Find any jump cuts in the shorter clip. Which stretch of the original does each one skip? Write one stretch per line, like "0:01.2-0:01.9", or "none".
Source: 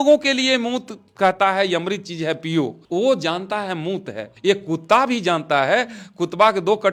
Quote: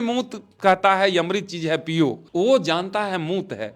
none